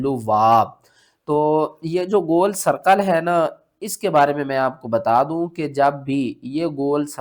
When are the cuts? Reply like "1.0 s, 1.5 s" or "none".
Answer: none